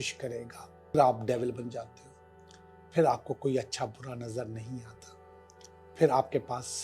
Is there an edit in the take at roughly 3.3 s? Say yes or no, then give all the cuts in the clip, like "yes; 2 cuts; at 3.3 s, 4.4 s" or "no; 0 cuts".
no; 1 cut; at 1.0 s